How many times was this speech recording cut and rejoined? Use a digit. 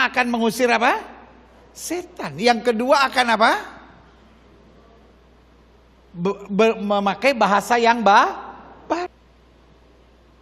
1